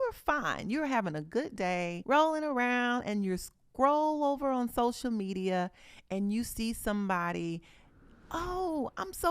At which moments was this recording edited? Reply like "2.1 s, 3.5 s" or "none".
2.0 s